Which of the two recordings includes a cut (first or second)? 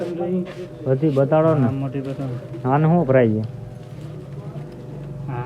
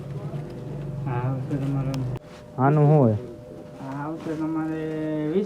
second